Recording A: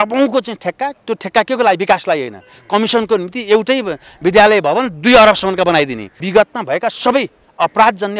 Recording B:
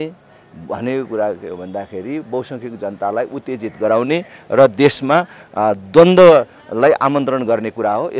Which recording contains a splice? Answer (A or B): A